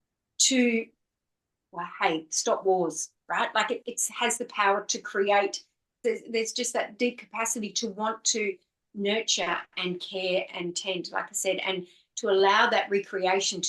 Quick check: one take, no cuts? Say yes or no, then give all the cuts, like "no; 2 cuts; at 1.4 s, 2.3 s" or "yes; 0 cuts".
no; 1 cut; at 5.9 s